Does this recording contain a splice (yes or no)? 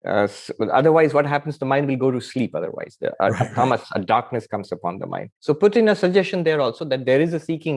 yes